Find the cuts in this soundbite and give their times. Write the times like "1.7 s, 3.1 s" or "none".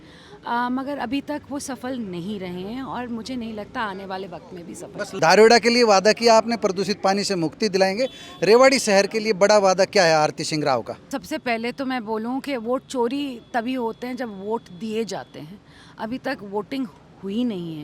5.2 s, 11.1 s